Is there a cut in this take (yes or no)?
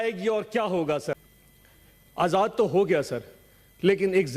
yes